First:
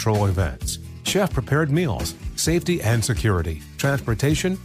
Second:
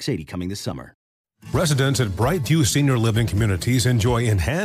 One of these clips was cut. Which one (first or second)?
second